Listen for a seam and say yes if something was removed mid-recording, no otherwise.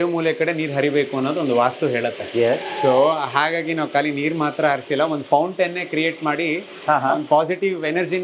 no